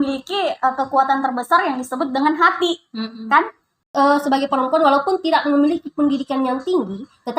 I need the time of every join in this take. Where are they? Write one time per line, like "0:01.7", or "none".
0:03.8